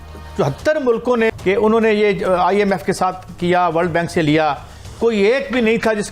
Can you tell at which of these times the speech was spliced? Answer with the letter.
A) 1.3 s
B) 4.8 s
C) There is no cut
A